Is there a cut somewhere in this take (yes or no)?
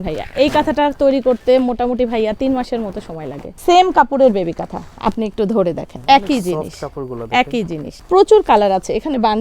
yes